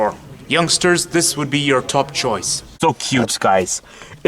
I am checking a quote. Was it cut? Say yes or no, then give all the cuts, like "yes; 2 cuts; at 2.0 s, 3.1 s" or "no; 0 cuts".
yes; 1 cut; at 2.6 s